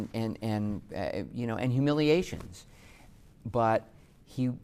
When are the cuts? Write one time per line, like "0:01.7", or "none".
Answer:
none